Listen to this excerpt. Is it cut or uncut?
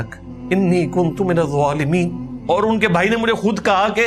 cut